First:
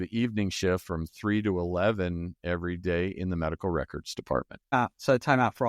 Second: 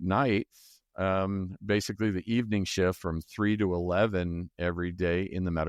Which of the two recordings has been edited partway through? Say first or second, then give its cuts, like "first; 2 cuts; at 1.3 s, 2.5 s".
first; 1 cut; at 4.7 s